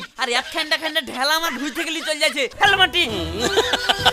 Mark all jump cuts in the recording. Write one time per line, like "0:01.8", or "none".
0:02.5